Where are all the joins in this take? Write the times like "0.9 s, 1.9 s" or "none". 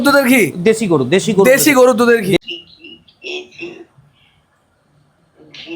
2.4 s

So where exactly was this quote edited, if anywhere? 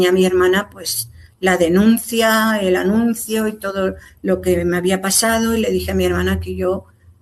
none

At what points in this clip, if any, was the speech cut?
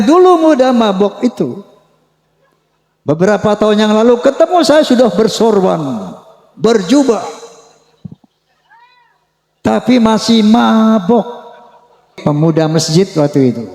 12.2 s

